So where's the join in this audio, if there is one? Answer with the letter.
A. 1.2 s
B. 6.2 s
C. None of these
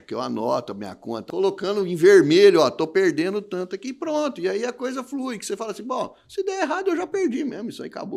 A